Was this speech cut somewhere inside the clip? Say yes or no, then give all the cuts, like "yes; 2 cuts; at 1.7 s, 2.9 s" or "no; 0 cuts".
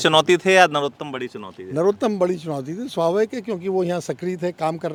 no; 0 cuts